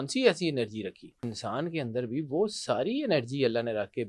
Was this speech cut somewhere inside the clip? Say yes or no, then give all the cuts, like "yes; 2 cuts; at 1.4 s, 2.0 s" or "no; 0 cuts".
yes; 1 cut; at 1.3 s